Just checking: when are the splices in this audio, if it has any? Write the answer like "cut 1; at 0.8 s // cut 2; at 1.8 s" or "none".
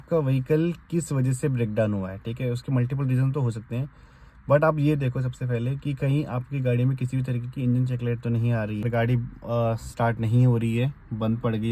cut 1; at 8.9 s